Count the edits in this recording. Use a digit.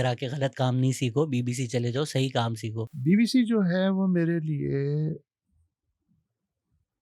1